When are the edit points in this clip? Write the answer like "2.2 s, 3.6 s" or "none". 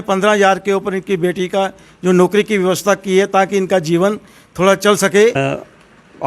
5.3 s